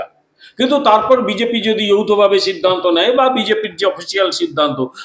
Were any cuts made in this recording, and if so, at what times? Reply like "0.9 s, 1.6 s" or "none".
none